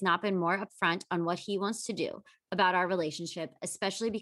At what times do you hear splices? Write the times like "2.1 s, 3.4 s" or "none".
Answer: none